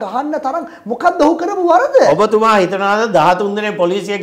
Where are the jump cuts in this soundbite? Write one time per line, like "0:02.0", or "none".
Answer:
none